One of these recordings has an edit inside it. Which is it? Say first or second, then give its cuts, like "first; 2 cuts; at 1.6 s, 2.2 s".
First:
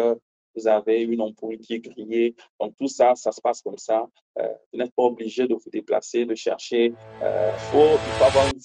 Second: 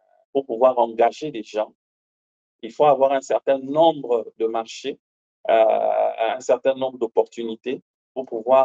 first; 1 cut; at 7.6 s